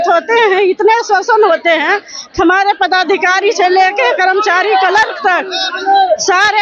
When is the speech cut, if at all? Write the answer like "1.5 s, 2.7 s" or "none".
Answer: none